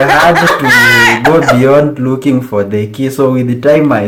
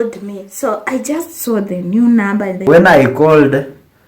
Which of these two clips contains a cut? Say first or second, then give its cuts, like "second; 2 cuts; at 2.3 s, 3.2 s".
second; 1 cut; at 2.7 s